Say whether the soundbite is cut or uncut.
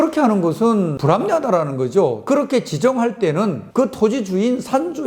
cut